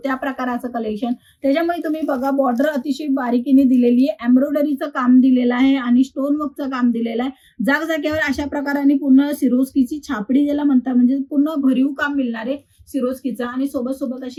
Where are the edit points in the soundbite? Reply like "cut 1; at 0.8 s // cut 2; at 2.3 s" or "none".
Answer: none